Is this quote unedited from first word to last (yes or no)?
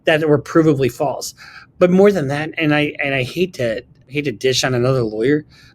no